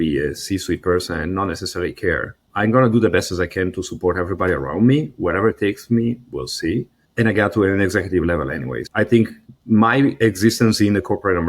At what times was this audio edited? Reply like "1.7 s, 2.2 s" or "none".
2.4 s, 7.0 s, 8.8 s, 9.5 s